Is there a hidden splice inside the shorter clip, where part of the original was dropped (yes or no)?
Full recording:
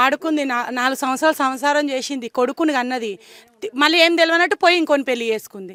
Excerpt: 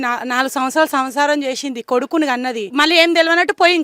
yes